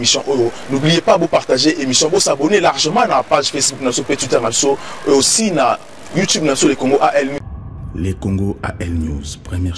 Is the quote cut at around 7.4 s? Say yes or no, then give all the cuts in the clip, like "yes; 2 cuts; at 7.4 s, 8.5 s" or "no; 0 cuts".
yes; 1 cut; at 7.4 s